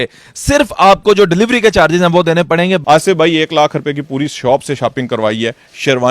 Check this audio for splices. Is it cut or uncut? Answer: cut